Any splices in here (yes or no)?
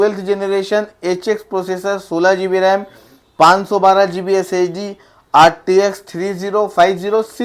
no